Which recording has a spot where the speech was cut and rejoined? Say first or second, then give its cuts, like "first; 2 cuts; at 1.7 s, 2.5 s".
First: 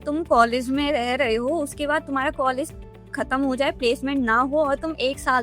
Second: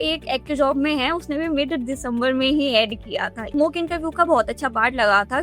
second; 1 cut; at 3.5 s